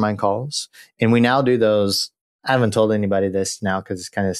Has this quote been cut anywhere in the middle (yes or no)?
no